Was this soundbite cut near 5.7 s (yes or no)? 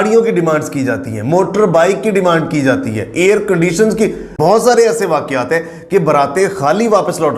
no